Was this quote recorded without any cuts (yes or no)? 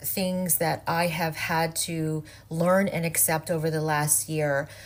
yes